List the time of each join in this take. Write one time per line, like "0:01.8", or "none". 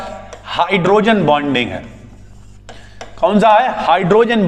none